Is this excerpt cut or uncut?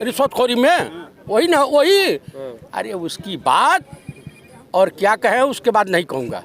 uncut